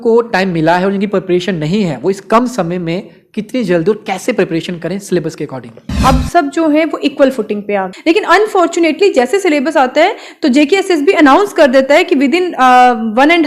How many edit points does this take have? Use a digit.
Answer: 2